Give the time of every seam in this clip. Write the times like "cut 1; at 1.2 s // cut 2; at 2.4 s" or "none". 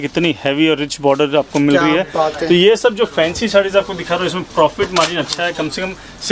none